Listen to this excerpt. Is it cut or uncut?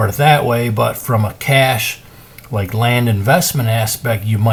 uncut